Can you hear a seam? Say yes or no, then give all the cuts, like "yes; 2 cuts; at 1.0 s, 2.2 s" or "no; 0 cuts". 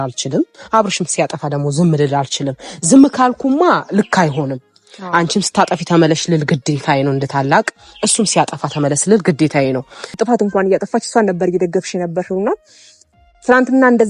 yes; 1 cut; at 10.1 s